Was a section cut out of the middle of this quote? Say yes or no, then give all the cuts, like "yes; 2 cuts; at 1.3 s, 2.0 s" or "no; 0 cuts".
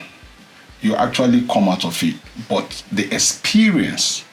no; 0 cuts